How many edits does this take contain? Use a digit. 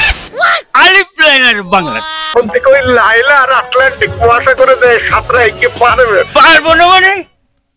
1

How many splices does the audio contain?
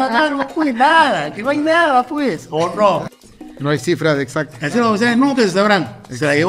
1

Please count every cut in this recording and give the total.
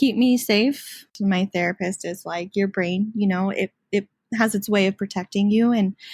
1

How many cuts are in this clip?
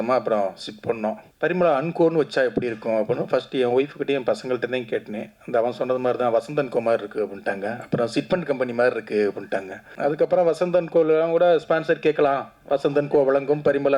2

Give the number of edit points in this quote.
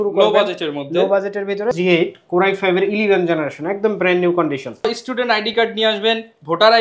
2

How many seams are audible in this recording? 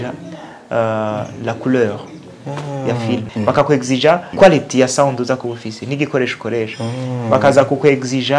2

